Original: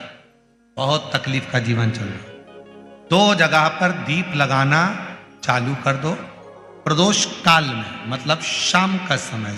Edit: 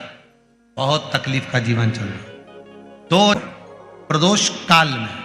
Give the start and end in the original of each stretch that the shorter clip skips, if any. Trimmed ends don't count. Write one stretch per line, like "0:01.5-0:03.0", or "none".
0:03.4-0:06.1